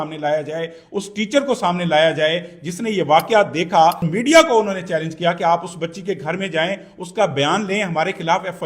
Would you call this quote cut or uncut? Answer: cut